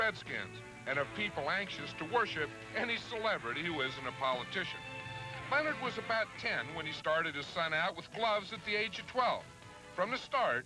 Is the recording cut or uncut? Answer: uncut